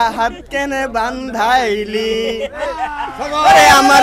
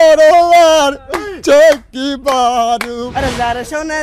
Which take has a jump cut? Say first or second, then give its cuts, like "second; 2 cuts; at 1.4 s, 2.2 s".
second; 1 cut; at 3.1 s